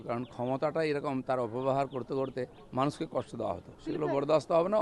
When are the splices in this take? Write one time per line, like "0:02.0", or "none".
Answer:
0:02.6
0:03.7